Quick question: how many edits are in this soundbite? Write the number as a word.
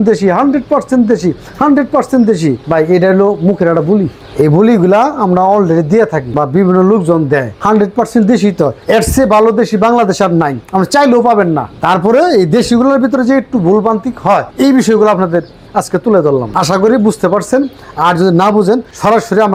zero